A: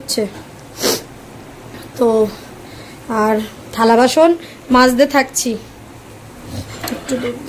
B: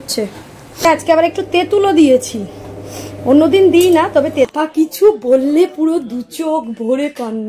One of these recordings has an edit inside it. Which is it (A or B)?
B